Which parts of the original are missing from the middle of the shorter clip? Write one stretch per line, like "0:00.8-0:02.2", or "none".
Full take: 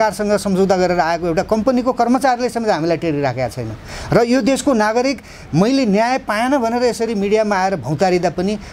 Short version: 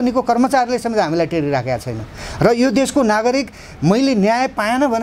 none